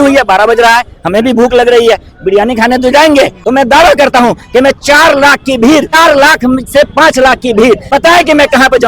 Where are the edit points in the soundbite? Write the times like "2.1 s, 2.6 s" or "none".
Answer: 3.4 s, 5.9 s, 7.8 s